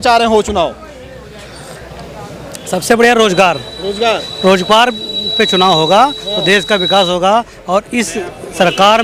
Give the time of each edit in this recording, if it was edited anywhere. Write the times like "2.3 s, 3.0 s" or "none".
none